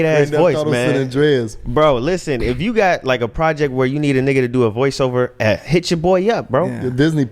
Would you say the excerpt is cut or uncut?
uncut